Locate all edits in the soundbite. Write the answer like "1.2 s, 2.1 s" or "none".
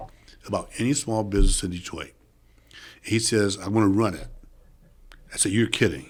none